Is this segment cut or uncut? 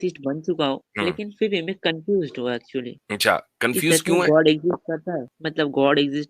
cut